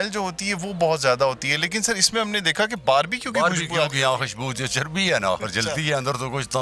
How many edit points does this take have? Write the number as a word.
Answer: zero